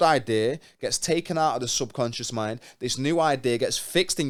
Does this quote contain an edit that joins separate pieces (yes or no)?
no